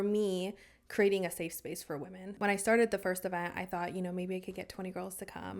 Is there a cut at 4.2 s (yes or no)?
no